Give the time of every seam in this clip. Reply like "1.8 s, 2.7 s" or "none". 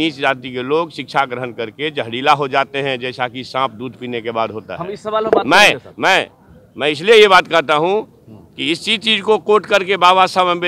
none